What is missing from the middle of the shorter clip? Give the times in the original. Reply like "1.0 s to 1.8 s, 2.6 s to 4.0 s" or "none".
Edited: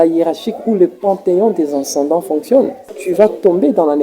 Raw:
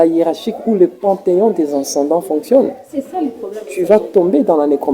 2.9 s to 3.6 s